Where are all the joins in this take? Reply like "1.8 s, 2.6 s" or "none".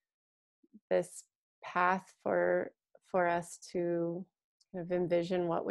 none